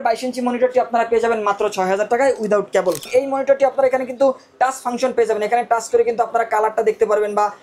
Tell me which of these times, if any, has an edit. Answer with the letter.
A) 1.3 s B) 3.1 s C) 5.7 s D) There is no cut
B